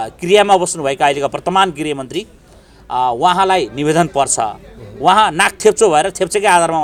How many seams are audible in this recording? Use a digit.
0